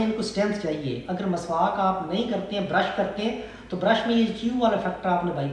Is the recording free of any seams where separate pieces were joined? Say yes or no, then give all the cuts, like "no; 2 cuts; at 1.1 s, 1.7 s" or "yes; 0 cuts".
yes; 0 cuts